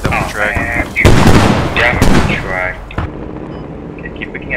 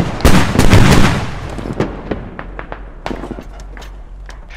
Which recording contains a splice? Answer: first; 1 cut; at 3.0 s

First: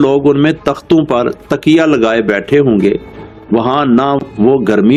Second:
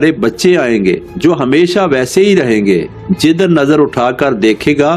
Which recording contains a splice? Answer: second; 1 cut; at 3.0 s

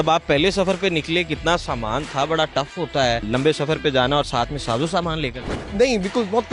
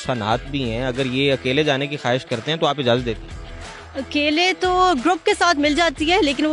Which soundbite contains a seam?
first; 2 cuts; at 3.2 s, 5.5 s

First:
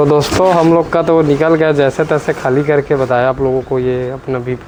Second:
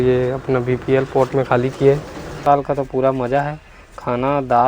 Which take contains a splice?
second; 1 cut; at 2.4 s

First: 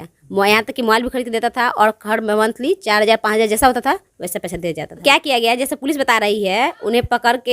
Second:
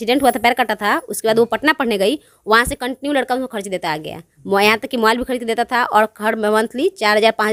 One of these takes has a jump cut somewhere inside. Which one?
first; 1 cut; at 5.0 s

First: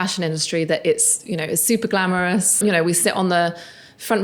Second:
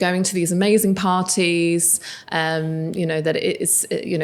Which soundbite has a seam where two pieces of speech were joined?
first; 1 cut; at 2.6 s

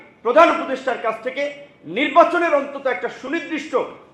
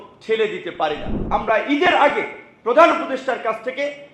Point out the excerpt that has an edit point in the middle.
second; 1 cut; at 1.1 s

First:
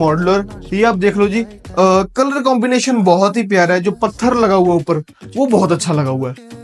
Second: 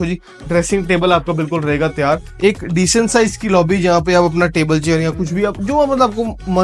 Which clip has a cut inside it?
second; 1 cut; at 2.3 s

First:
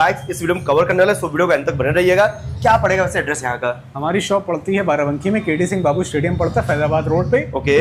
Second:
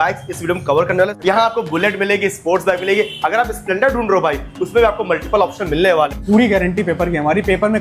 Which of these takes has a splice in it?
second; 2 cuts; at 1.2 s, 6.2 s

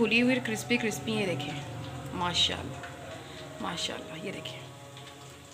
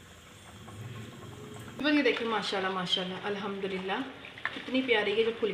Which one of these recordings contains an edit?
second; 1 cut; at 1.8 s

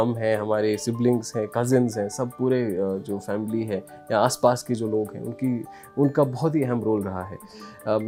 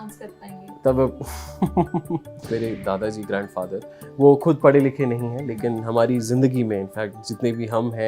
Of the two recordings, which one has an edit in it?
second; 1 cut; at 2.5 s

